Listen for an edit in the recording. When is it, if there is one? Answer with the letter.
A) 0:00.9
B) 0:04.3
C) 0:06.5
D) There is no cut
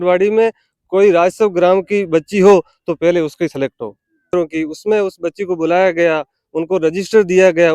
B